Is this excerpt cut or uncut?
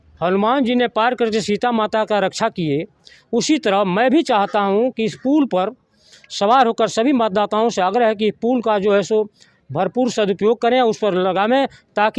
uncut